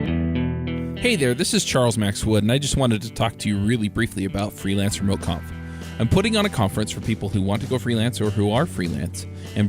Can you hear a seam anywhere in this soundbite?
yes; 1 cut; at 0.9 s

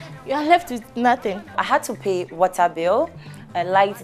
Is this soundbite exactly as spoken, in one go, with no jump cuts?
no; 1 cut; at 1.4 s

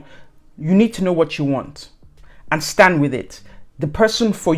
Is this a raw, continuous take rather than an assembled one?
yes; 0 cuts

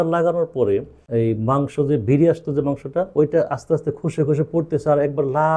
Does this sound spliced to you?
yes; 1 cut; at 1.0 s

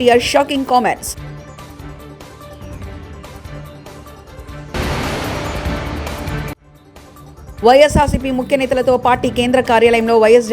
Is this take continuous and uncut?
no; 4 cuts; at 1.1 s, 3.2 s, 4.7 s, 6.3 s

